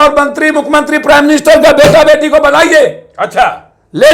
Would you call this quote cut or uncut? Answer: uncut